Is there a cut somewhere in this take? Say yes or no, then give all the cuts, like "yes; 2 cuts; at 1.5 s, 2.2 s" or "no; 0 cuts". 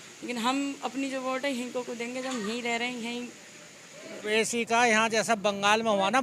yes; 1 cut; at 4.2 s